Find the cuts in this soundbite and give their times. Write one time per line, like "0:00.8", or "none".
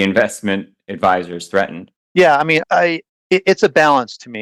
none